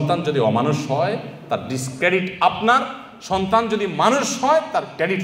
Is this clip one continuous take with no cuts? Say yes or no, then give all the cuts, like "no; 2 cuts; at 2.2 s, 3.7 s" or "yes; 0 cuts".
yes; 0 cuts